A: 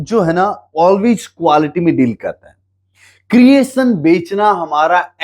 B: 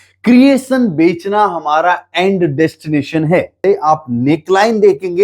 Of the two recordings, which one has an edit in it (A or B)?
B